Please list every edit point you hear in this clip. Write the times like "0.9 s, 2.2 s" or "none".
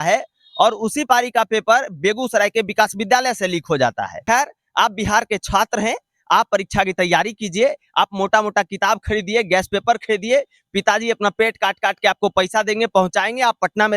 4.2 s